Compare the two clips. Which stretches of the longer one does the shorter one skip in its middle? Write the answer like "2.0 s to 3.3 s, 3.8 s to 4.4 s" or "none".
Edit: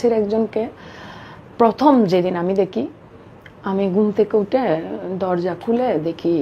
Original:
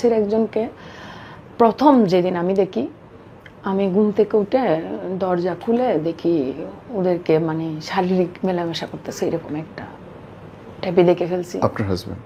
none